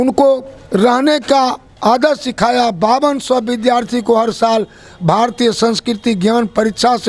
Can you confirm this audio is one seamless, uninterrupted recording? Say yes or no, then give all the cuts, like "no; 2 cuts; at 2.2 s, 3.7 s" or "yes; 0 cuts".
yes; 0 cuts